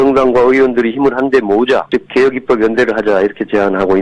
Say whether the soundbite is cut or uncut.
cut